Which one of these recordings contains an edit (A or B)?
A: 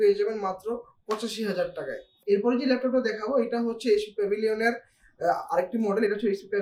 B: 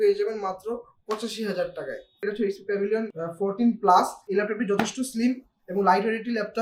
B